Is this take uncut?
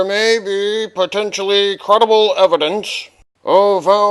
yes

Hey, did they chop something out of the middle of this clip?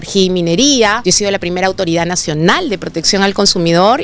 yes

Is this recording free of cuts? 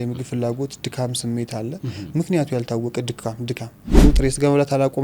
no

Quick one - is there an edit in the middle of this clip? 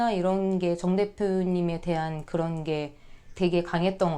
no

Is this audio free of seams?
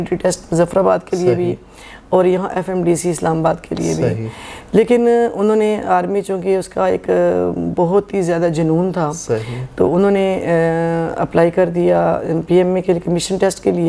yes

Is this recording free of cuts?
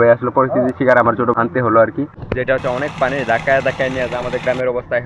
no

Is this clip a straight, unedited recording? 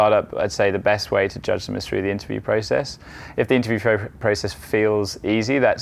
yes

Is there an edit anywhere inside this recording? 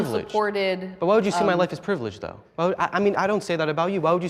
yes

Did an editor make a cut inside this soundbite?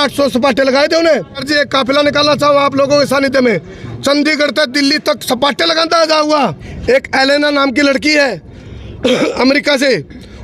yes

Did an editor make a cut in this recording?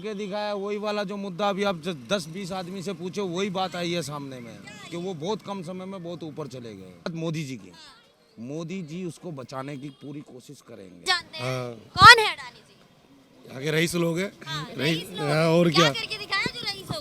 yes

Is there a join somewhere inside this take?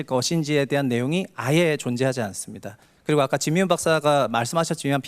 no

